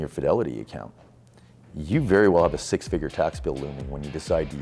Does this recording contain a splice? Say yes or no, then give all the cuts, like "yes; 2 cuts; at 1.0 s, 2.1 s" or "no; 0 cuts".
no; 0 cuts